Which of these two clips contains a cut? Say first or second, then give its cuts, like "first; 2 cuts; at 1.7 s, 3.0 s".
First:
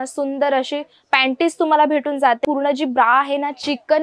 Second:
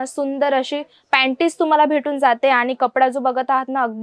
first; 1 cut; at 2.4 s